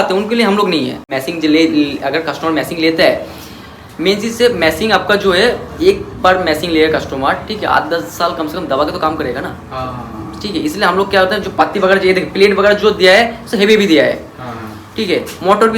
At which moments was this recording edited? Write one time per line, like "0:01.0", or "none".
0:01.0